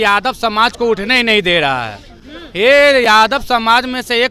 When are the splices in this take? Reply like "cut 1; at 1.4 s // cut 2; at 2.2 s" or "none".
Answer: none